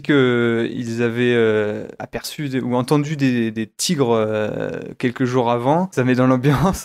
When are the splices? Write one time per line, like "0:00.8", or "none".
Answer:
0:05.9